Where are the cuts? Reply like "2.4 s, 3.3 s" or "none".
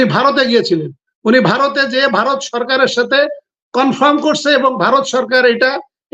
none